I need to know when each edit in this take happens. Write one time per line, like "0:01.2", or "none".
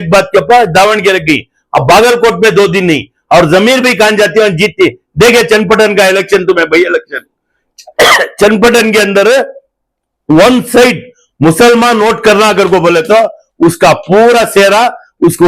none